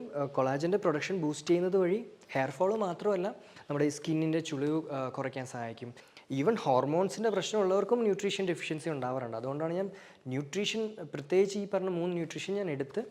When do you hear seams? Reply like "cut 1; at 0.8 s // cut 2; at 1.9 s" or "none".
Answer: cut 1; at 6.0 s